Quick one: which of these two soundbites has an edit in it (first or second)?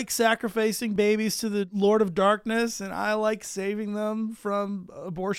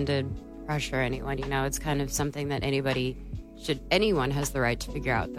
first